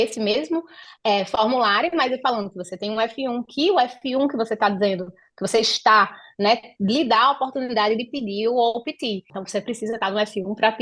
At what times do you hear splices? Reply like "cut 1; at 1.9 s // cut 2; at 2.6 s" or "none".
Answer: cut 1; at 9.3 s

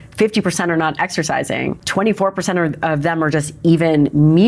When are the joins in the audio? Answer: cut 1; at 1.8 s

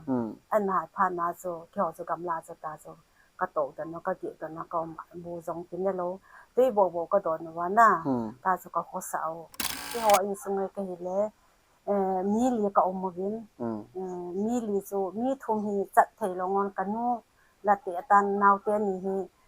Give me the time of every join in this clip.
cut 1; at 9.8 s

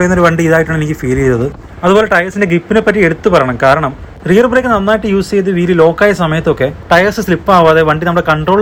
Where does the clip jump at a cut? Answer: none

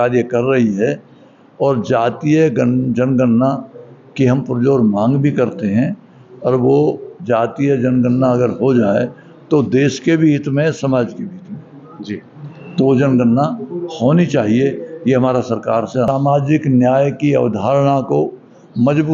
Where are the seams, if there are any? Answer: cut 1; at 16.1 s

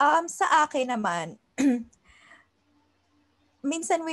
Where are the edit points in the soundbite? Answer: none

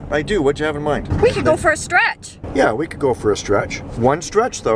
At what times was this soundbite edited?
cut 1; at 1.1 s // cut 2; at 2.3 s

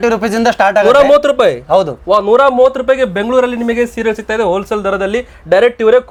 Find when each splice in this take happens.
none

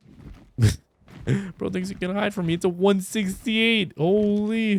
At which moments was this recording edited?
none

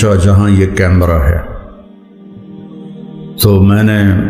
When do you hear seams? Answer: cut 1; at 1.5 s // cut 2; at 3.2 s

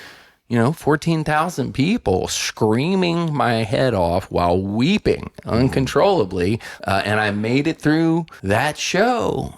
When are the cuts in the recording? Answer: cut 1; at 6.7 s // cut 2; at 8.3 s

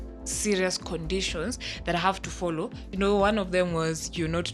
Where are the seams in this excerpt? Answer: cut 1; at 2.9 s

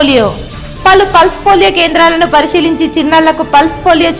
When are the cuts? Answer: none

